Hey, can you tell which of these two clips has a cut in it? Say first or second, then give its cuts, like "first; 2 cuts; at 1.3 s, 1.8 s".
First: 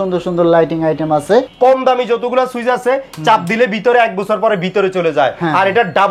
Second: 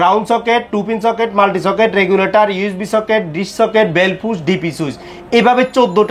first; 1 cut; at 1.5 s